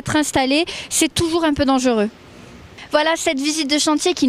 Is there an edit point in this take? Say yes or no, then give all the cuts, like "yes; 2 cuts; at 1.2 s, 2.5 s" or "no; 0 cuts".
yes; 1 cut; at 2.7 s